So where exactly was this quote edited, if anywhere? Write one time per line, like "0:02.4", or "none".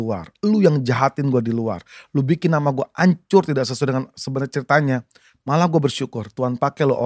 none